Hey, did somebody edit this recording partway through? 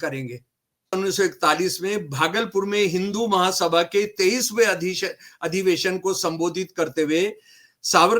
yes; 1 cut; at 0.9 s

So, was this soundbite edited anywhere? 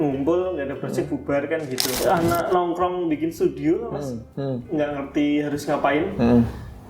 yes; 1 cut; at 1.8 s

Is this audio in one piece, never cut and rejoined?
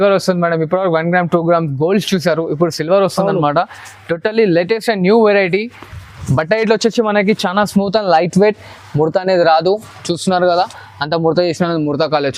yes; 0 cuts

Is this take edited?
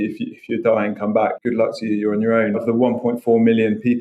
yes; 2 cuts; at 1.4 s, 2.6 s

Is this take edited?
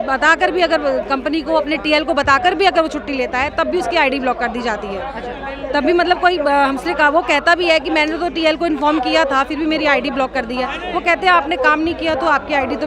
no; 0 cuts

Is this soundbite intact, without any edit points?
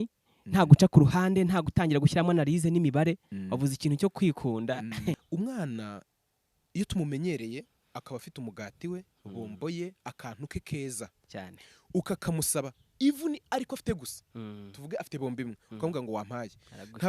no; 1 cut; at 5.2 s

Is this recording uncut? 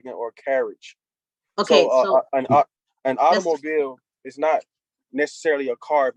yes; 0 cuts

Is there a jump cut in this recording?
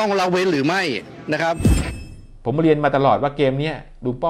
yes; 1 cut; at 1.9 s

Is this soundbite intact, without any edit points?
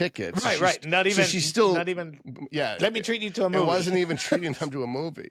yes; 0 cuts

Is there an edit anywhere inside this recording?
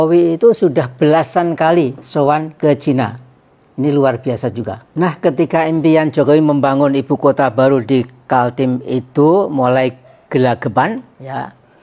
yes; 1 cut; at 4.8 s

